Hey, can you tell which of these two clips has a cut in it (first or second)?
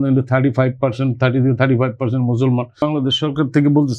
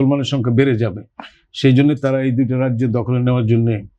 first